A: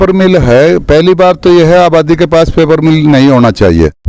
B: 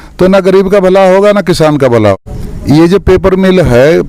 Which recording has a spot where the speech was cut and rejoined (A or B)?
B